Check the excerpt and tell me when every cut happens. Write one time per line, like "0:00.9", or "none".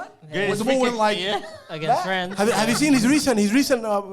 0:02.3

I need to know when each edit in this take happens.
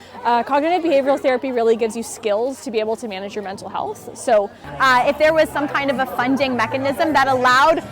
0:04.6

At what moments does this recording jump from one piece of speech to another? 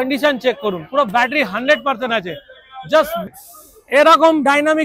0:03.2

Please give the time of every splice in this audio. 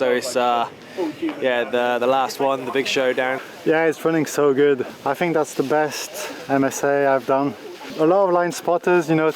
0:03.4
0:04.9
0:07.9

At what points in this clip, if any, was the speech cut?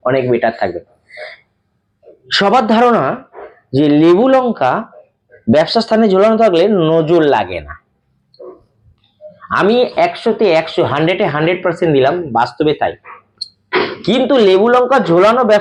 none

